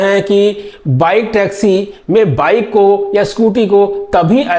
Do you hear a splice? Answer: no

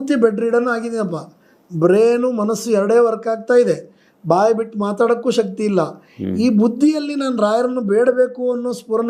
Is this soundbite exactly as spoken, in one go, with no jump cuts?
yes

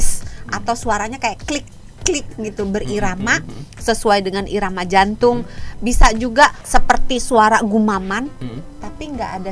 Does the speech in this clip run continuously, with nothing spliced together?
no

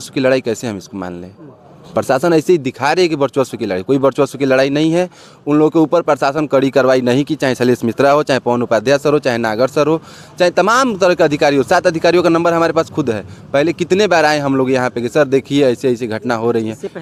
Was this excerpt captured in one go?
yes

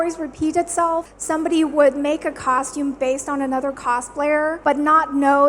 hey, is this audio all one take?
no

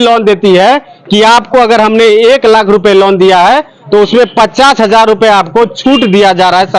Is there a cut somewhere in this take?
no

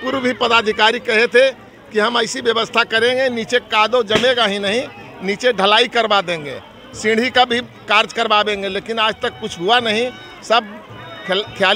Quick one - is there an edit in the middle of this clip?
no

